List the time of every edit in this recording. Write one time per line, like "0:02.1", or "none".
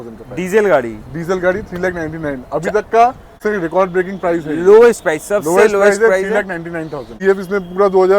0:03.3
0:07.1